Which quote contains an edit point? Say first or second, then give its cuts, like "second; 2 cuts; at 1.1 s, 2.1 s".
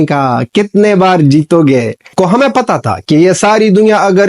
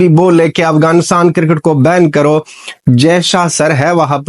first; 1 cut; at 2.1 s